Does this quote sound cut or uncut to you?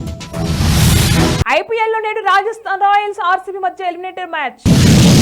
cut